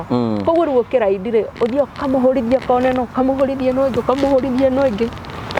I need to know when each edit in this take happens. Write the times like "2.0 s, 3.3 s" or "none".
none